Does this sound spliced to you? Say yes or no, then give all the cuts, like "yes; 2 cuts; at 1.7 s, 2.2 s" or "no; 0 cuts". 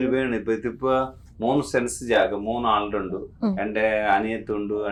no; 0 cuts